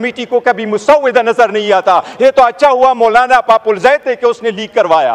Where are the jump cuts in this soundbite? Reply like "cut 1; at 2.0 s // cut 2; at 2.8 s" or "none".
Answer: none